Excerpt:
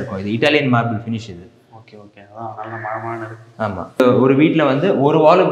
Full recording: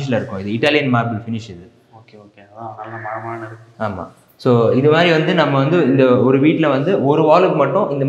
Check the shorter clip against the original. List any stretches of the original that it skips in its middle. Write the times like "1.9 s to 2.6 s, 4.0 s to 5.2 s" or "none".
4.2 s to 6.0 s